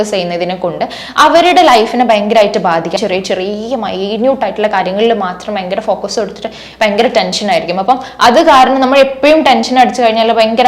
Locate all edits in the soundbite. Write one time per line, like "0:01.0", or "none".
0:02.9